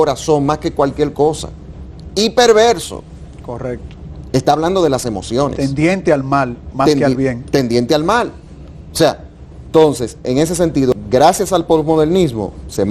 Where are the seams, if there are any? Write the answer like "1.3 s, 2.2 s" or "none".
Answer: 10.9 s